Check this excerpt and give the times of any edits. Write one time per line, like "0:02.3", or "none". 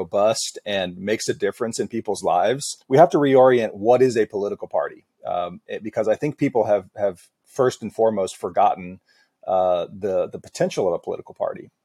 0:02.7